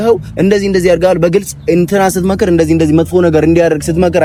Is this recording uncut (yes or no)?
yes